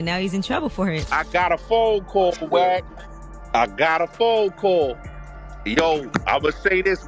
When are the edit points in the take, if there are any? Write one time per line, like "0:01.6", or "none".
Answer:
0:01.0

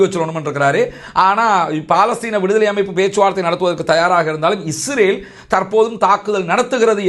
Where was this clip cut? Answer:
none

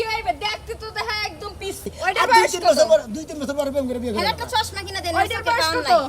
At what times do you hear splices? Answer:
0:01.9

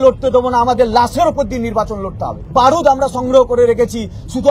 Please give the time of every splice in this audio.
0:02.4

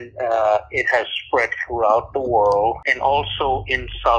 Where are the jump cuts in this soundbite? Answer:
0:02.9

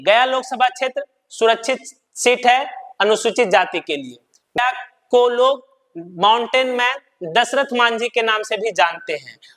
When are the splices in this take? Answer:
0:04.6

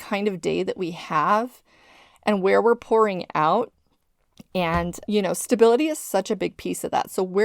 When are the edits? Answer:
0:05.0

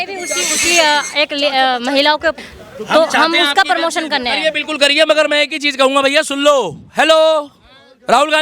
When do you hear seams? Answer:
0:02.4

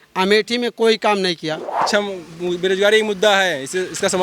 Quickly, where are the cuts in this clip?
0:01.9

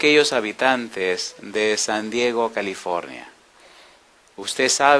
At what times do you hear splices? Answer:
0:03.5

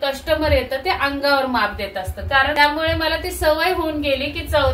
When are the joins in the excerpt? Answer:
0:02.6

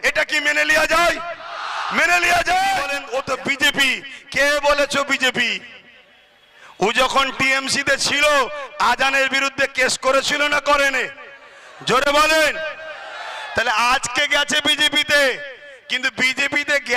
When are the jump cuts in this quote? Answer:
0:03.0

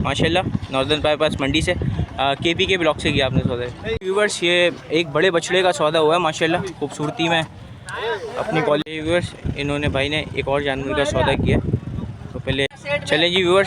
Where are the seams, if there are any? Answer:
0:04.0
0:08.8
0:12.7

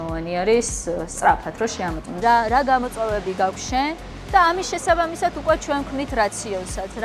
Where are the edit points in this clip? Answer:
0:02.2

